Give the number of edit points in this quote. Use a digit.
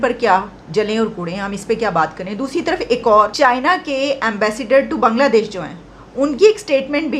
1